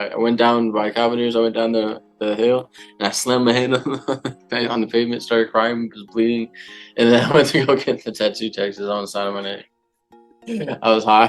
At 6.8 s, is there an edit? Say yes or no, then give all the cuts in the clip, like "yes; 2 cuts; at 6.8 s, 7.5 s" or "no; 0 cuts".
no; 1 cut; at 10.1 s